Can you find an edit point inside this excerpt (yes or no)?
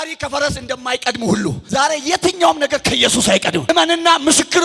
yes